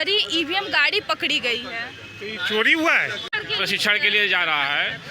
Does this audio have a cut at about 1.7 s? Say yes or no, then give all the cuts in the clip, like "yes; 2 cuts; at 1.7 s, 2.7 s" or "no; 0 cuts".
no; 1 cut; at 3.3 s